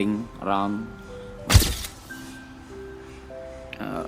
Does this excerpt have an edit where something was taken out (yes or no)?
yes